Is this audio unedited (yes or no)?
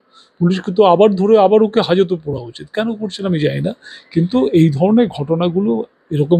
yes